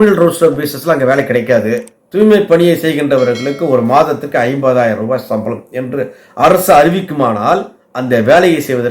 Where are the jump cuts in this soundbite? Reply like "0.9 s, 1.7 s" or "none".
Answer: 2.0 s

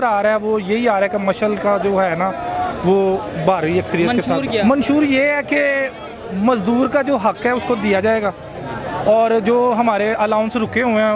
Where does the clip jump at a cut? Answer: none

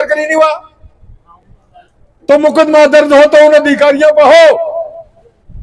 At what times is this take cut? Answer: none

